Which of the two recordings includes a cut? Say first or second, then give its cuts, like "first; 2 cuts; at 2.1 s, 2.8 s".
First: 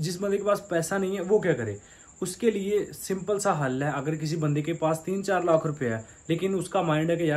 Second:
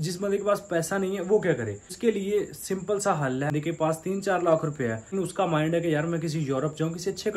second; 3 cuts; at 1.8 s, 3.5 s, 5.1 s